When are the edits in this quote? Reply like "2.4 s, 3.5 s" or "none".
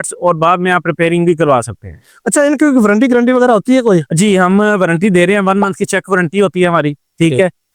none